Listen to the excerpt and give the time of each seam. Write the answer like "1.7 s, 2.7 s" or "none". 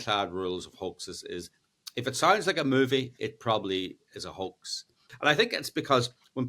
5.1 s